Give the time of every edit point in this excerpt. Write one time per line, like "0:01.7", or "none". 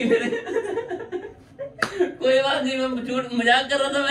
none